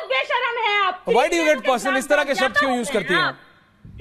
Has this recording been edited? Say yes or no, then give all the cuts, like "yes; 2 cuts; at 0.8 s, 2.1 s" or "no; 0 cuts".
no; 0 cuts